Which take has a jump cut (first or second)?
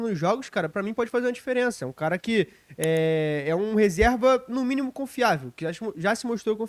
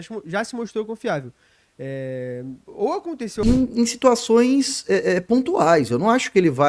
second